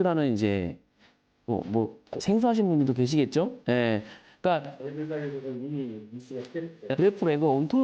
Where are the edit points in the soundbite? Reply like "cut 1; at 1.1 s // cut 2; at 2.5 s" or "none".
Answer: cut 1; at 6.9 s